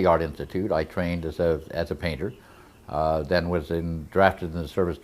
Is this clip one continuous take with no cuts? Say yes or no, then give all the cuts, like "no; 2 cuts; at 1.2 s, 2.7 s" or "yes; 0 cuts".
no; 1 cut; at 3.3 s